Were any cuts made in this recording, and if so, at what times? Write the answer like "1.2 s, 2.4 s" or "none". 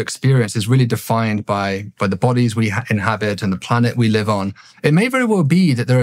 none